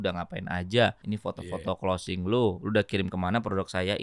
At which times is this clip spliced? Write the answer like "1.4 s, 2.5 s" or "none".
1.0 s